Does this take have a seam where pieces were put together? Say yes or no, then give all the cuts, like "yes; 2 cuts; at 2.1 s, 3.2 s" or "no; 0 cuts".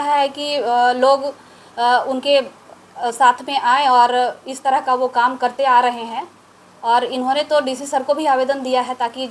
no; 0 cuts